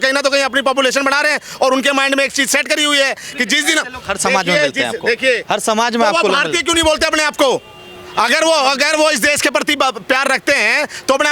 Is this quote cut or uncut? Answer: uncut